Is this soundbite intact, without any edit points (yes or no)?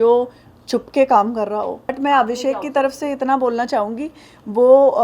no